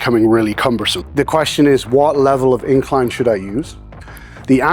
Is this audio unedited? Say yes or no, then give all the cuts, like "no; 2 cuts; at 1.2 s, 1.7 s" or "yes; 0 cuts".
no; 1 cut; at 1.0 s